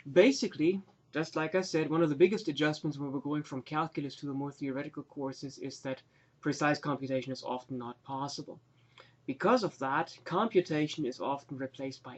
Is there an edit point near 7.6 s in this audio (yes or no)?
no